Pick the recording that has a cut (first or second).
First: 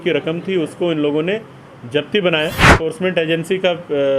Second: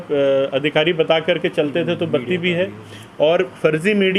first